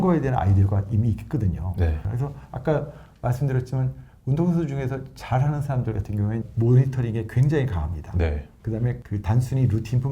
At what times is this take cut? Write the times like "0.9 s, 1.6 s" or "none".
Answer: 2.0 s, 6.4 s, 9.0 s